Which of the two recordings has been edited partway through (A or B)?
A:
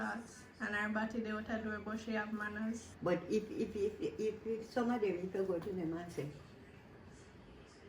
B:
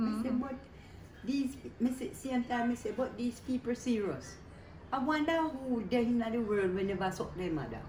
A